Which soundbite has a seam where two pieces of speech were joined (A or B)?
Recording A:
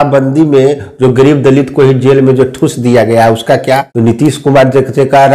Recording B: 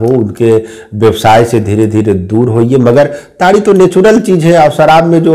A